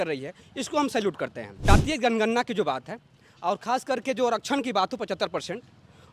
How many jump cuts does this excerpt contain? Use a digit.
1